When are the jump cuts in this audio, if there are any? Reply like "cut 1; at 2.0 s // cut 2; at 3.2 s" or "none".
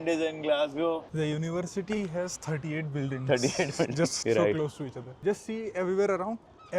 cut 1; at 1.1 s // cut 2; at 4.2 s